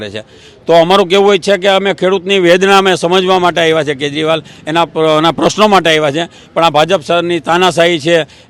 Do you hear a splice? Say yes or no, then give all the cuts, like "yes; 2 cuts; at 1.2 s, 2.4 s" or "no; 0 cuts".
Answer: no; 0 cuts